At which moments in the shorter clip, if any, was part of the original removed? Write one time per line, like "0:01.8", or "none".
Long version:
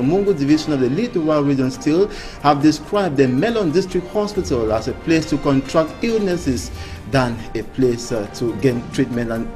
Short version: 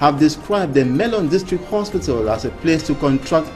none